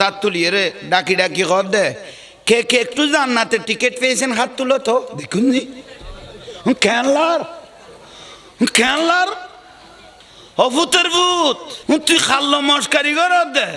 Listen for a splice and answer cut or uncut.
cut